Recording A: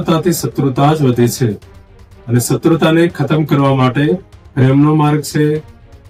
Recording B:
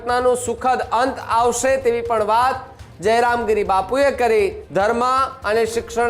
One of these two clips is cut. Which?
B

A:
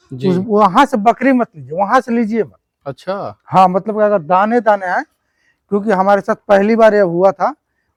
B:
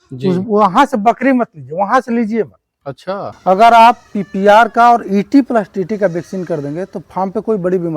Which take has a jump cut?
B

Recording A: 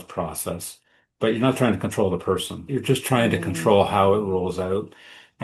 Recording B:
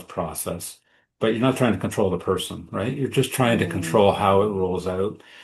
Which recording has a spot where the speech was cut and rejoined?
A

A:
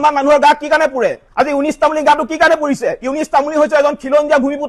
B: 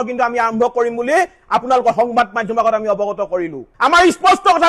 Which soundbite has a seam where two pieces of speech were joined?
B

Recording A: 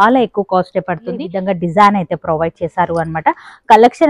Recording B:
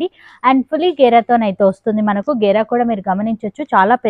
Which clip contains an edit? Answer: A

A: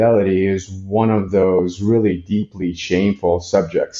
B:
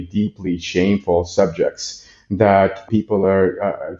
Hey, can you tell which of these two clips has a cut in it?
B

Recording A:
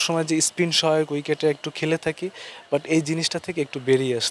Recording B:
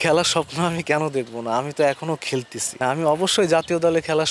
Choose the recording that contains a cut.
B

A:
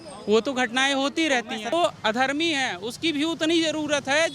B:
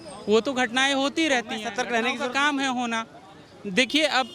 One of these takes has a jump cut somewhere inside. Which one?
A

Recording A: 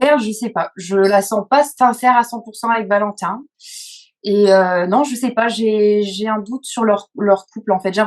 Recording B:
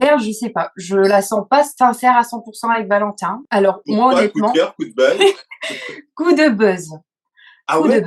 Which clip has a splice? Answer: B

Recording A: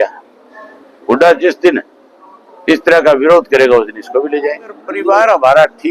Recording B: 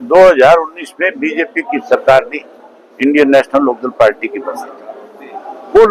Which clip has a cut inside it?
A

